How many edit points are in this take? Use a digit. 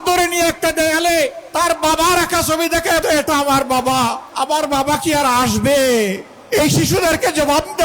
4